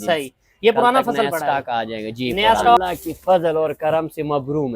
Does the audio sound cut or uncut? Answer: cut